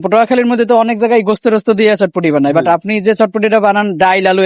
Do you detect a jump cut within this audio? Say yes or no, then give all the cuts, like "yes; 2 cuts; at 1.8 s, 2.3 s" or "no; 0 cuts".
no; 0 cuts